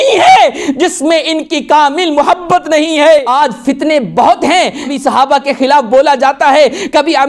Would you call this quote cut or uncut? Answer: cut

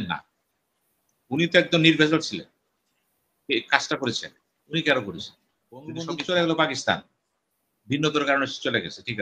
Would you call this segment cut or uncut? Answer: cut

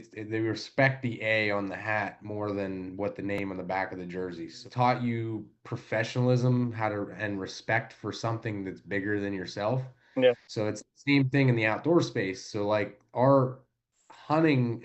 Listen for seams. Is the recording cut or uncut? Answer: cut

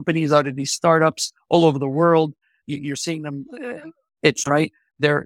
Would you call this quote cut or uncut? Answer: uncut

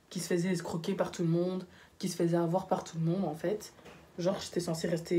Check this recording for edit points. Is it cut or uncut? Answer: uncut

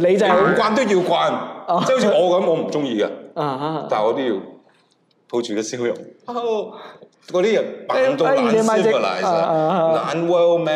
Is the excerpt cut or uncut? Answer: uncut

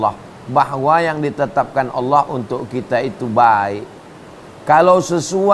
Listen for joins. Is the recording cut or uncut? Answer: uncut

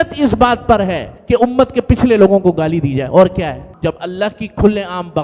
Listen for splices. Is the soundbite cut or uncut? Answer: cut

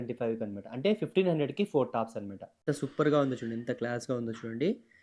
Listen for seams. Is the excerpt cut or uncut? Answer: cut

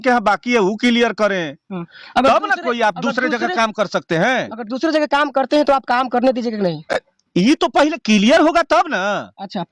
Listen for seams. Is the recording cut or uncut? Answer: uncut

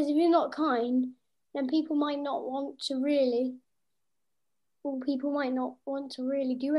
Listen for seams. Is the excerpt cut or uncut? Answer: uncut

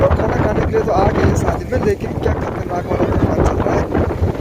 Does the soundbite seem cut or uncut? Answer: uncut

